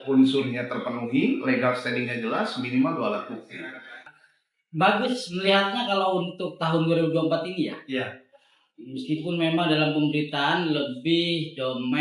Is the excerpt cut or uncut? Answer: cut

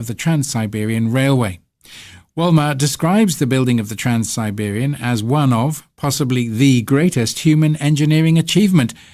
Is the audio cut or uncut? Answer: cut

